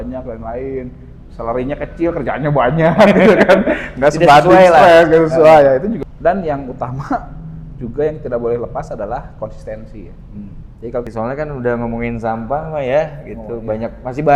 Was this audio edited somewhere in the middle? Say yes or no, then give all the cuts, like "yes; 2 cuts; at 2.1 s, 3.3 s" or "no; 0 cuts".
yes; 2 cuts; at 6.0 s, 11.1 s